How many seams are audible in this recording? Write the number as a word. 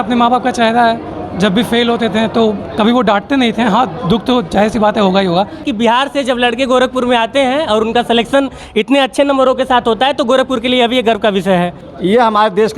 two